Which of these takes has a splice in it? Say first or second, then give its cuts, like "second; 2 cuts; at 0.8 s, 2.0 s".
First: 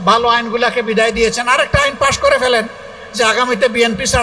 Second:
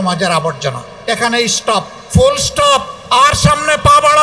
second; 3 cuts; at 0.9 s, 2.0 s, 2.9 s